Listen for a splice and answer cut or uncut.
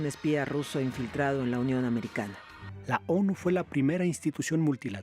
cut